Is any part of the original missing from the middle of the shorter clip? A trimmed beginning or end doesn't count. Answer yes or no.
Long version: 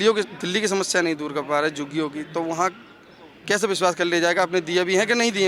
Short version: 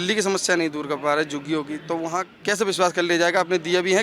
yes